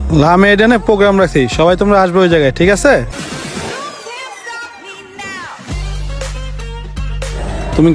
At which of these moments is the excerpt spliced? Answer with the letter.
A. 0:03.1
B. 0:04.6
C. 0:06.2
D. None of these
A